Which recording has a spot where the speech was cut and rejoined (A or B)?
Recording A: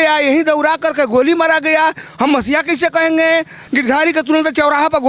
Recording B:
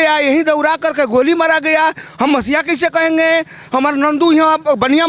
A